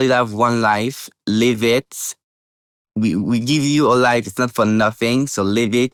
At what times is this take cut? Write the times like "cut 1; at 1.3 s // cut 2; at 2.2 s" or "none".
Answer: none